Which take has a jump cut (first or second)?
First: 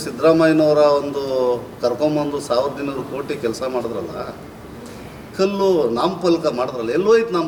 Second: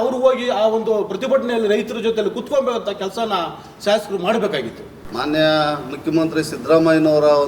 second